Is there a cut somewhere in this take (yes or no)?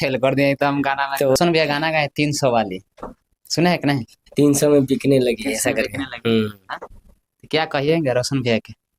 yes